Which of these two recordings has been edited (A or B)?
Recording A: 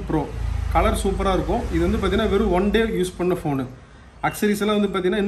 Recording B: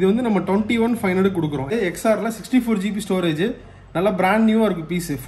B